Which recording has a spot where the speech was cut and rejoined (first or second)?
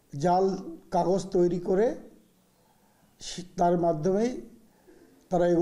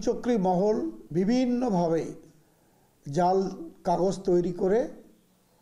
second